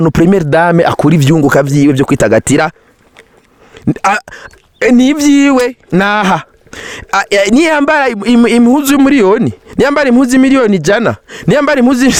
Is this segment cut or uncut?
uncut